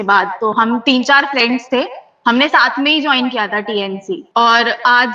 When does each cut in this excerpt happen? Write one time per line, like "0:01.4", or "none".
0:04.2